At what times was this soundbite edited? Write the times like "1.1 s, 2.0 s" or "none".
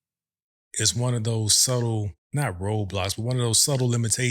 2.2 s